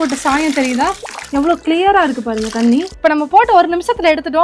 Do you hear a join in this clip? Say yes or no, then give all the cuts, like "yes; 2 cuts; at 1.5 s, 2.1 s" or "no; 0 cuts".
yes; 2 cuts; at 1.1 s, 3.0 s